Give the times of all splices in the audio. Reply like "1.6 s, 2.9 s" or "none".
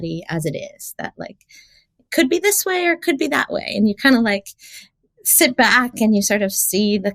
none